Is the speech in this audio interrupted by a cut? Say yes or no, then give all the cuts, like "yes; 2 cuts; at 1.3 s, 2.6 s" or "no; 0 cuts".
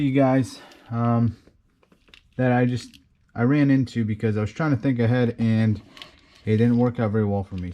no; 0 cuts